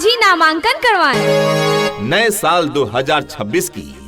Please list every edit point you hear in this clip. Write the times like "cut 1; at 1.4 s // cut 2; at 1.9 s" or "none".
cut 1; at 2.0 s